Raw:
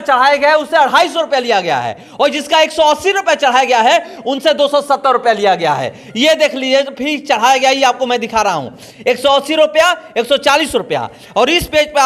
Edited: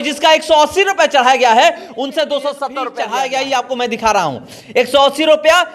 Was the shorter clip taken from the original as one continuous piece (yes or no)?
no